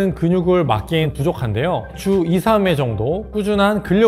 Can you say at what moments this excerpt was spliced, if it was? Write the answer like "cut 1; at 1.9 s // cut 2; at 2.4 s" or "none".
cut 1; at 1.1 s